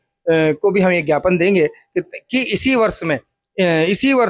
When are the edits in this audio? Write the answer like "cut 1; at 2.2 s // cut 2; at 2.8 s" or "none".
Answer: none

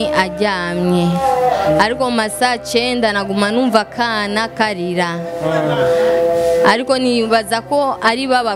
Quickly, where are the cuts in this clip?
none

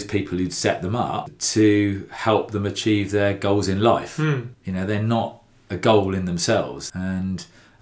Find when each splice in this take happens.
cut 1; at 1.4 s // cut 2; at 4.5 s // cut 3; at 6.8 s

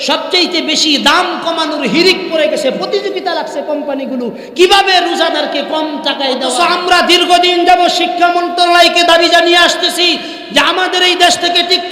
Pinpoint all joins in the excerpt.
cut 1; at 6.5 s

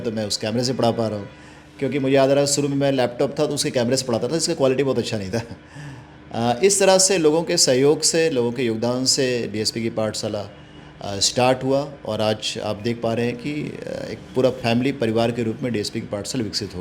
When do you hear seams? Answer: none

